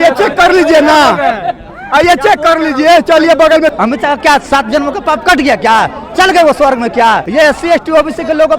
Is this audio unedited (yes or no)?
no